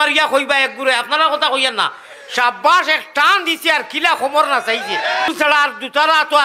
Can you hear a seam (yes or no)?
yes